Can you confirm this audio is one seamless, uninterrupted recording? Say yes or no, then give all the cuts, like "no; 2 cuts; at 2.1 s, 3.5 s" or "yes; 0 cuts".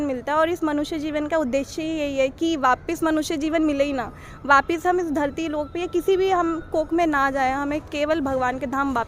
yes; 0 cuts